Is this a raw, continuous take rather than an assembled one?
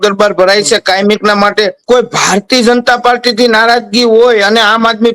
no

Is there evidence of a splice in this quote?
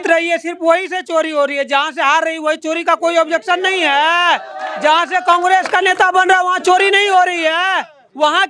no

